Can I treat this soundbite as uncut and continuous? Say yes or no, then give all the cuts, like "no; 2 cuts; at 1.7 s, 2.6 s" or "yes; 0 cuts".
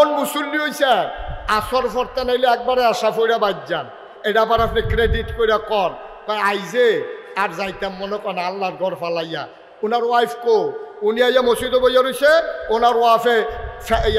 yes; 0 cuts